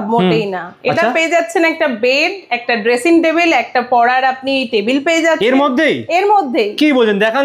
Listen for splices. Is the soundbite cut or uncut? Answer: uncut